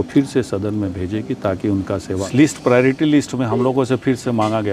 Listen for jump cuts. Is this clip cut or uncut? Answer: cut